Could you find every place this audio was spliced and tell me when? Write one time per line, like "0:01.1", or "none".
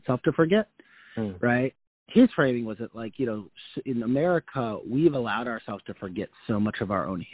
0:01.8